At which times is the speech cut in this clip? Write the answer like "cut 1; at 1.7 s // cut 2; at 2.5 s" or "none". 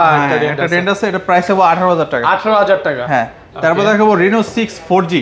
none